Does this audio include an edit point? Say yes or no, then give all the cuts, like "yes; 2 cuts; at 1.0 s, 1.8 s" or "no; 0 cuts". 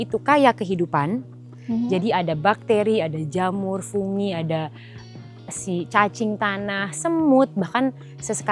no; 0 cuts